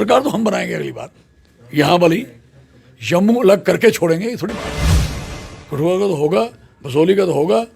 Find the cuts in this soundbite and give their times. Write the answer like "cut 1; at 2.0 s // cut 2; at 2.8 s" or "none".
cut 1; at 1.6 s // cut 2; at 4.6 s // cut 3; at 5.5 s

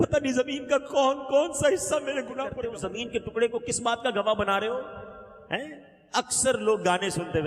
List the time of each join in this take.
cut 1; at 2.6 s

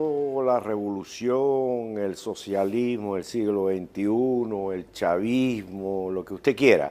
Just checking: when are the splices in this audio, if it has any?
none

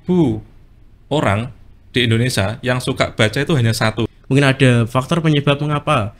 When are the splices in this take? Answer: cut 1; at 4.2 s

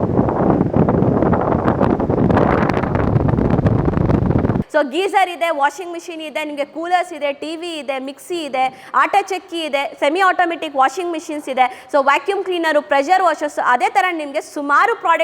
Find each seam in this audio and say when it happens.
cut 1; at 4.6 s

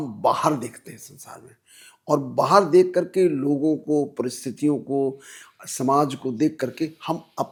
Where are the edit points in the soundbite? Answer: none

